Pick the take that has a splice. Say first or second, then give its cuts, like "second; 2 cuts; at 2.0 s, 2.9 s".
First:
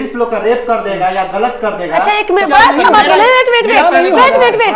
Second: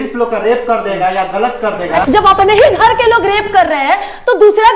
second; 1 cut; at 2.0 s